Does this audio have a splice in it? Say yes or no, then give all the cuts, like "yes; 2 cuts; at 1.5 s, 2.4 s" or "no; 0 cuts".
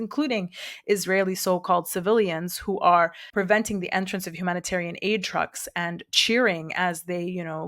no; 0 cuts